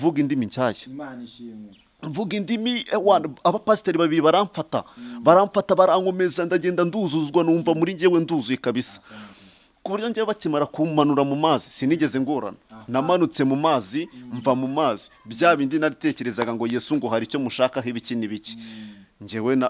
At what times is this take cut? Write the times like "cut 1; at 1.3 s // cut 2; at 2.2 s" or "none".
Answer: none